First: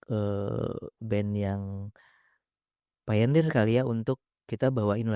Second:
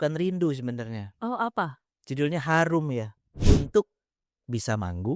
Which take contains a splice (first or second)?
second